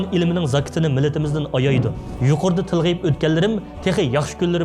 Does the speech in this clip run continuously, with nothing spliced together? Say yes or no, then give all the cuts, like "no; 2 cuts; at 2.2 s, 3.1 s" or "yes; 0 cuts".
no; 1 cut; at 2.0 s